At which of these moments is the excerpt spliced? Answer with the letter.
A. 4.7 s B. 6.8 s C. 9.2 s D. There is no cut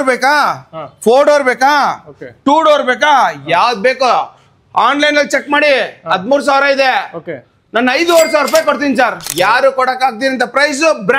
C